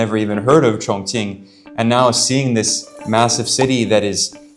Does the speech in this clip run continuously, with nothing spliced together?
yes; 0 cuts

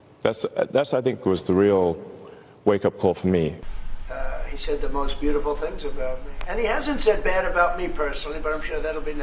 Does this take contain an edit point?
yes; 1 cut; at 3.6 s

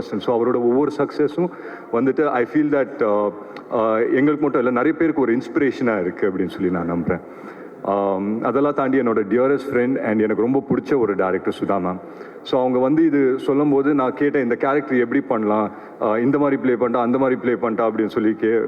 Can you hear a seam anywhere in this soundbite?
no; 0 cuts

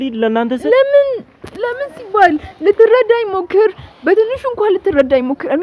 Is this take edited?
no; 0 cuts

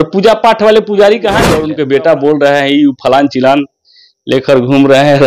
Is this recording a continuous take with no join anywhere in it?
no; 1 cut; at 1.6 s

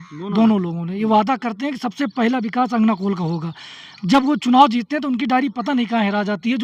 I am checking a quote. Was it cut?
no; 0 cuts

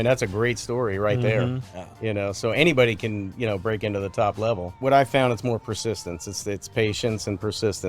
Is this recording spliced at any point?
yes; 1 cut; at 4.8 s

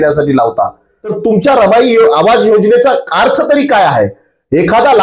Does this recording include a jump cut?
yes; 1 cut; at 1.1 s

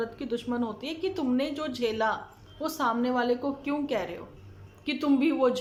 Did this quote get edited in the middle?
no; 0 cuts

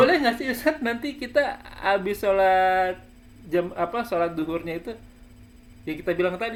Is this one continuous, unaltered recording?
yes; 0 cuts

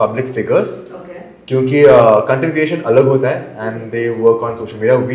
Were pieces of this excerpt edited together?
no; 0 cuts

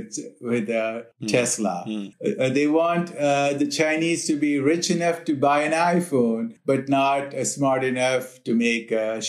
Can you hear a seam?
no; 0 cuts

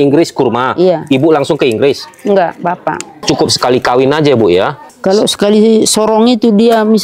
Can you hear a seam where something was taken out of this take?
yes; 2 cuts; at 3.2 s, 4.9 s

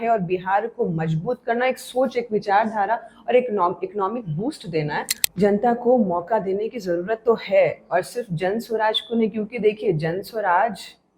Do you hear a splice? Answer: yes; 1 cut; at 5.2 s

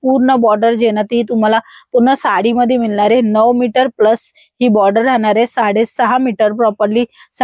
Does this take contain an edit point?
no; 0 cuts

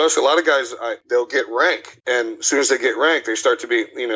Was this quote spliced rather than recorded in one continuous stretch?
yes; 2 cuts; at 1.0 s, 1.9 s

